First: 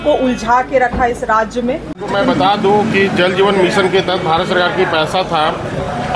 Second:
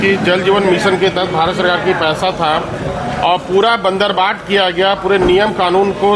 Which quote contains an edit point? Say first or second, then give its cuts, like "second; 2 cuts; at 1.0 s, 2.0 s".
first; 1 cut; at 1.9 s